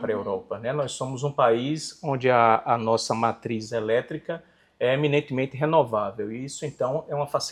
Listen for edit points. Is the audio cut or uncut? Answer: uncut